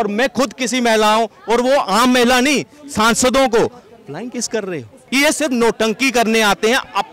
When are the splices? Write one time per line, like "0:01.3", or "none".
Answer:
0:04.9